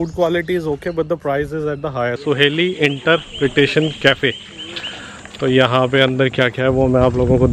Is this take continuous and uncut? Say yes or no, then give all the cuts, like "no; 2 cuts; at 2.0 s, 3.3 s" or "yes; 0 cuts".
no; 1 cut; at 2.3 s